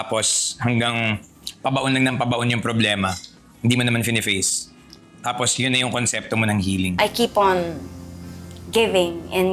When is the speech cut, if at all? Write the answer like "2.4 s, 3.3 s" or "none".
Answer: 7.0 s